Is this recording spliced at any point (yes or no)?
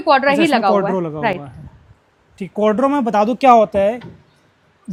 no